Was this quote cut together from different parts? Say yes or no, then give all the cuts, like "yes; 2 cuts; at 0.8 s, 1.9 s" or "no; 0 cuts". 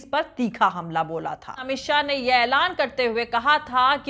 yes; 1 cut; at 1.6 s